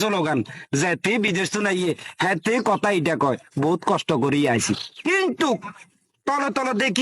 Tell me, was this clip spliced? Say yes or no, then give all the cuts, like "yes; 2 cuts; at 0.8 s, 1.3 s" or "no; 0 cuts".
no; 0 cuts